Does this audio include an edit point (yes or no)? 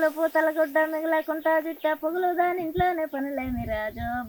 no